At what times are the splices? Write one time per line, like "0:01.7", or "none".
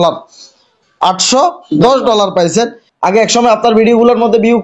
0:02.8